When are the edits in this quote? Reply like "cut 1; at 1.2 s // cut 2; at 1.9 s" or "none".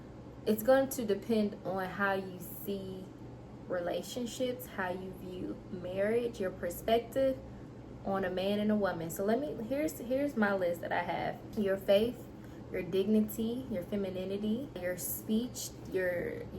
cut 1; at 11.4 s // cut 2; at 14.8 s